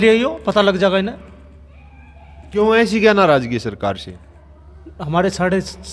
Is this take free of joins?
yes; 0 cuts

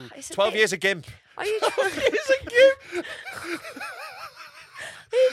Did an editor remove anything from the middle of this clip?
no; 0 cuts

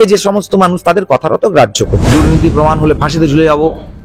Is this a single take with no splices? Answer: no; 1 cut; at 2.0 s

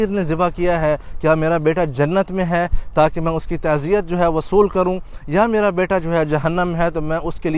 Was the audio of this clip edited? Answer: no; 0 cuts

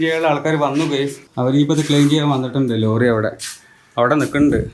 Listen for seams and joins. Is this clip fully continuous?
no; 1 cut; at 1.2 s

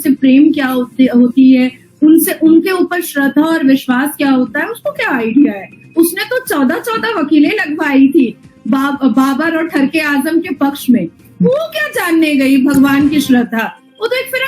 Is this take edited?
yes; 1 cut; at 13.5 s

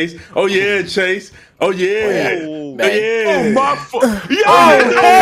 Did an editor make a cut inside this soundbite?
no; 0 cuts

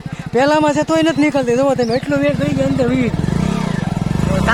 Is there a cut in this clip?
no; 0 cuts

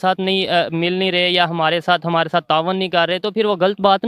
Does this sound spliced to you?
no; 0 cuts

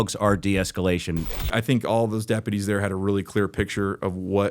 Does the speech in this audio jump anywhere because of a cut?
yes; 1 cut; at 1.5 s

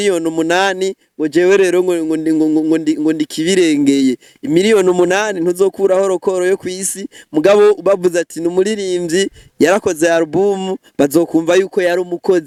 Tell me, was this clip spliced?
no; 0 cuts

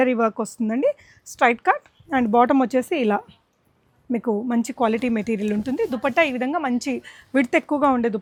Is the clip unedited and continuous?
yes; 0 cuts

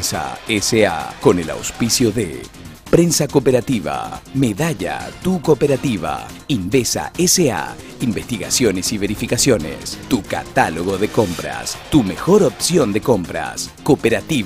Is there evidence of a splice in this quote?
yes; 1 cut; at 1.1 s

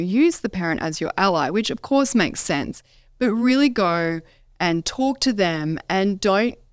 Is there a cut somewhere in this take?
no; 0 cuts

